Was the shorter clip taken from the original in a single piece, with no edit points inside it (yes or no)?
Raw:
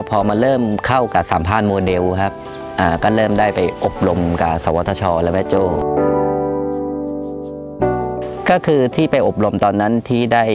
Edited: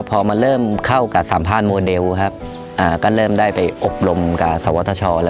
yes